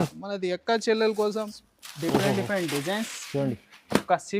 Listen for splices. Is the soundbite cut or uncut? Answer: cut